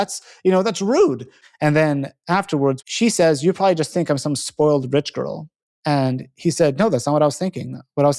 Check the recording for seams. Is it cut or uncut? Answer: cut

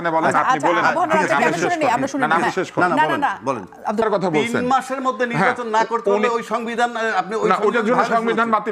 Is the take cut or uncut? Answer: cut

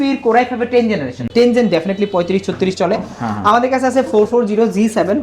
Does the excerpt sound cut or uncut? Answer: cut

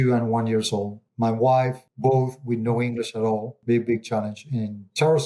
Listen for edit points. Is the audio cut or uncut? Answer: cut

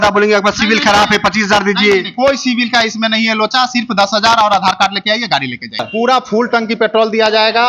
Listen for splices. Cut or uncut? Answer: cut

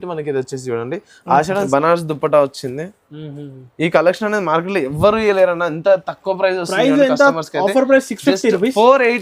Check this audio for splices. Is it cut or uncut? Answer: cut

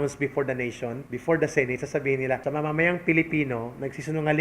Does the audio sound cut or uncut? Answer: cut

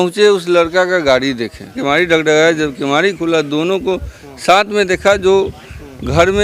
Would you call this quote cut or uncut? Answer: cut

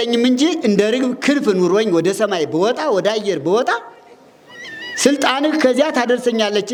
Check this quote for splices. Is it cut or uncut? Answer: uncut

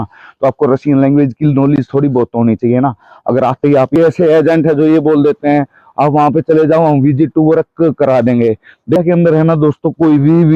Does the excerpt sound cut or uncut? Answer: cut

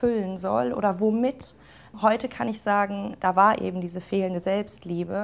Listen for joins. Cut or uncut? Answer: uncut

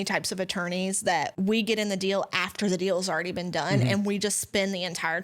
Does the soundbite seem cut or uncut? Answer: cut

